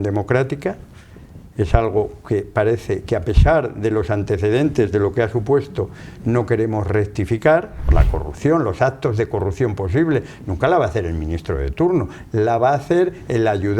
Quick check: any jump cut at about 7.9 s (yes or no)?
yes